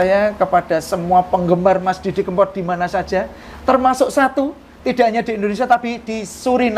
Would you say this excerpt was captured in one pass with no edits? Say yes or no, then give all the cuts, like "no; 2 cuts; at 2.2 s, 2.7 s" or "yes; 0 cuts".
yes; 0 cuts